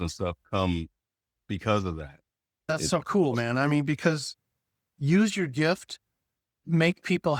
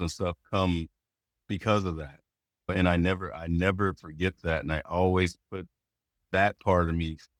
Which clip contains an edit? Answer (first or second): first